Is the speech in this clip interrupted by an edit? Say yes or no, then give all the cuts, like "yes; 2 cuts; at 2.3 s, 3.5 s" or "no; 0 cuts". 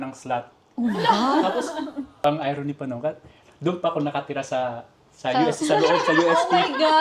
yes; 1 cut; at 2.2 s